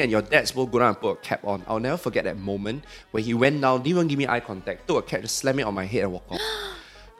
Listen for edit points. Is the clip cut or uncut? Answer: uncut